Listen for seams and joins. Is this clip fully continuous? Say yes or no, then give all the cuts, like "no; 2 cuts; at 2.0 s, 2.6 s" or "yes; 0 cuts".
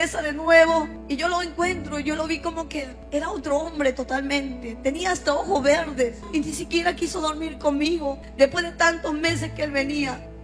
no; 2 cuts; at 1.0 s, 6.3 s